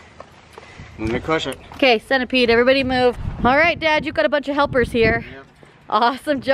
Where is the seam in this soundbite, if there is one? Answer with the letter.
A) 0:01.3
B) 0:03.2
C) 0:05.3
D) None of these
B